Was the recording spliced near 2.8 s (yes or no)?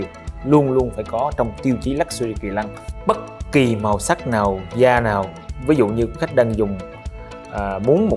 yes